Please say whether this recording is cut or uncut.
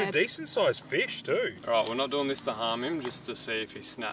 cut